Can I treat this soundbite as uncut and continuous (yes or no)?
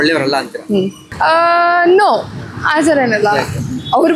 no